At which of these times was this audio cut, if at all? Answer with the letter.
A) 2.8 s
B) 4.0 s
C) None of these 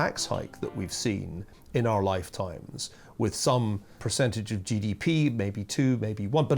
B